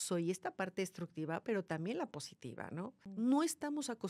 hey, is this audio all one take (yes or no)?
no